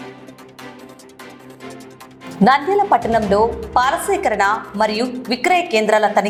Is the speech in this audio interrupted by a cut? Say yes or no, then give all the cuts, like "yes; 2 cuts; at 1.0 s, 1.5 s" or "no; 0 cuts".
no; 0 cuts